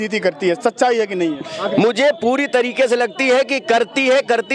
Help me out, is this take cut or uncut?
uncut